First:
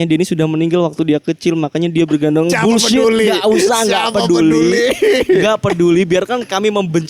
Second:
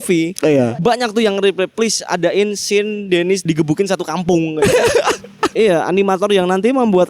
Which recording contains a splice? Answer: second; 2 cuts; at 3.5 s, 5.5 s

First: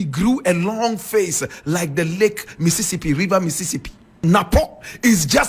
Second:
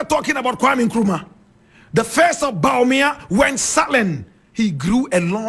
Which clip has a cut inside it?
first; 1 cut; at 4.2 s

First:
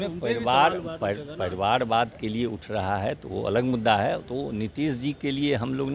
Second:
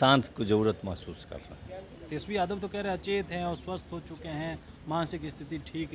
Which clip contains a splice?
second; 1 cut; at 2.0 s

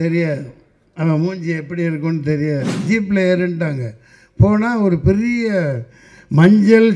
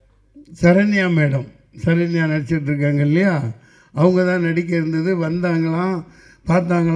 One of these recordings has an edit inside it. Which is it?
first; 1 cut; at 2.7 s

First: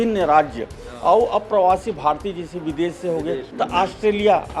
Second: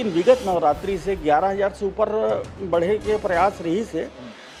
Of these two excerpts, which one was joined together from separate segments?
first; 1 cut; at 3.5 s

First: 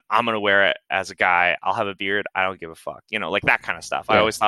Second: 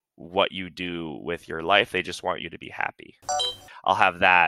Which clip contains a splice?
second; 1 cut; at 3.6 s

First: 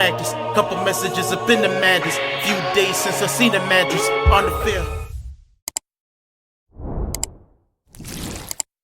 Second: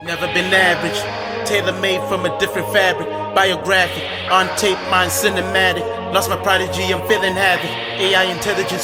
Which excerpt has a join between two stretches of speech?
first; 1 cut; at 5.1 s

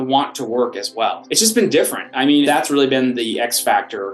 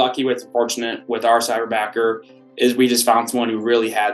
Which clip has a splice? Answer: first; 2 cuts; at 1.2 s, 2.5 s

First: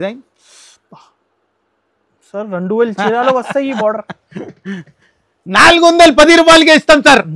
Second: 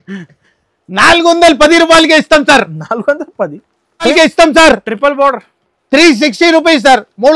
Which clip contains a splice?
second; 1 cut; at 4.1 s

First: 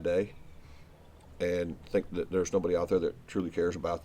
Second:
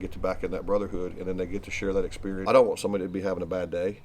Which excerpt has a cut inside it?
second; 1 cut; at 2.4 s

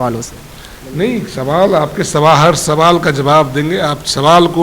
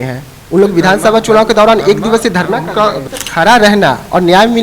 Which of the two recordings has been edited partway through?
second; 1 cut; at 3.0 s

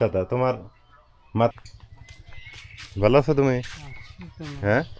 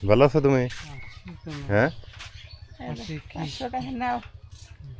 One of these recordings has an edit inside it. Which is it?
first; 1 cut; at 1.5 s

